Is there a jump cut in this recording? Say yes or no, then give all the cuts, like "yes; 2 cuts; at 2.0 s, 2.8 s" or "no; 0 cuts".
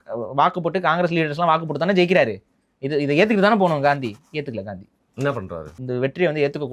yes; 1 cut; at 5.8 s